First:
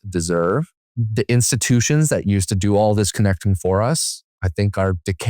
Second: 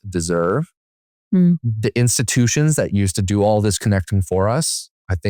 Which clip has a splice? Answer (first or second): first